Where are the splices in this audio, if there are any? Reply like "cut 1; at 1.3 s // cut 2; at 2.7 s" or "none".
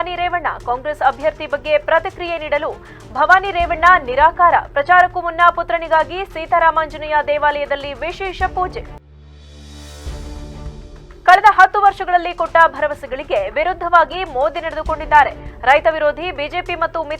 none